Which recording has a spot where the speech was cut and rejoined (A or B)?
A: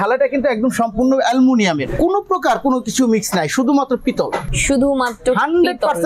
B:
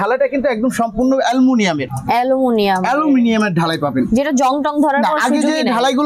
A